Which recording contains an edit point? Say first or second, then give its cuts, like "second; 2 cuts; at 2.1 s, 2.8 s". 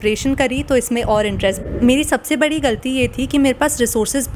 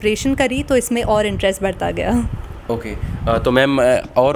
first; 1 cut; at 1.6 s